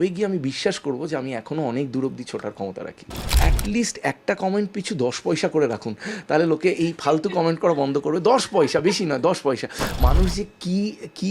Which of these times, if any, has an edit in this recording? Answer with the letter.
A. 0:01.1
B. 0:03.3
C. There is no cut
B